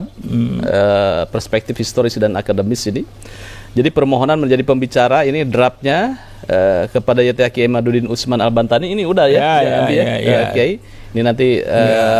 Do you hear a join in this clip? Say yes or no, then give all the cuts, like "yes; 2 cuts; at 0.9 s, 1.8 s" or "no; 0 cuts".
no; 0 cuts